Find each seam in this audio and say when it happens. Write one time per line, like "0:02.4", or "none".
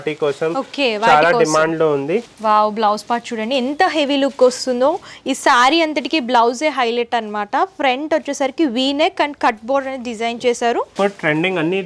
0:02.3
0:10.9